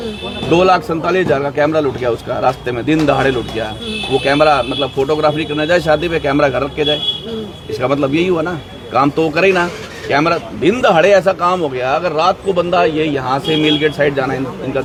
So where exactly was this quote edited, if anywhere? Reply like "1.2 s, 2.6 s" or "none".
none